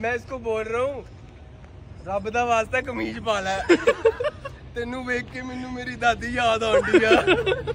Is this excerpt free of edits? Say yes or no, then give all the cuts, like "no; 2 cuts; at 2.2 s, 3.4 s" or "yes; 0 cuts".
yes; 0 cuts